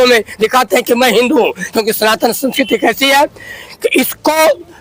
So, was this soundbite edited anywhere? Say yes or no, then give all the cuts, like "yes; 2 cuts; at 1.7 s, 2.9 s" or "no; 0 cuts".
no; 0 cuts